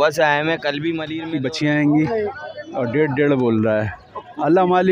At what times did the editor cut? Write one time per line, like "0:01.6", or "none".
0:01.1